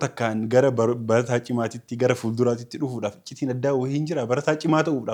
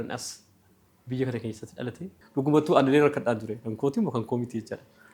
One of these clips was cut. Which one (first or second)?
second